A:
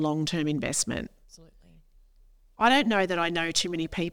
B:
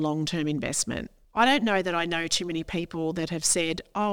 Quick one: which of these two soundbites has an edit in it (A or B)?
B